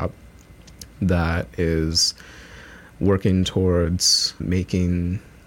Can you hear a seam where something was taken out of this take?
yes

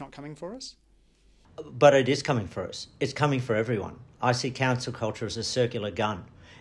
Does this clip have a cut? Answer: yes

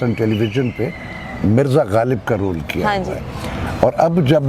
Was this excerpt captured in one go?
yes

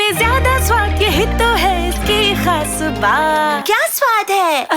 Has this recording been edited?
yes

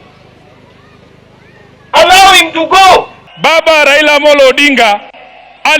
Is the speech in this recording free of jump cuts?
no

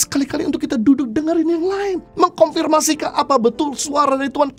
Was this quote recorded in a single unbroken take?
yes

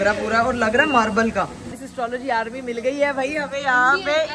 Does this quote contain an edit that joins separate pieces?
yes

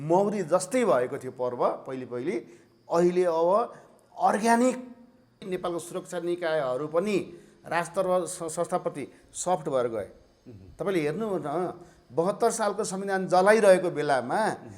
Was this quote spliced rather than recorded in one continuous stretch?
yes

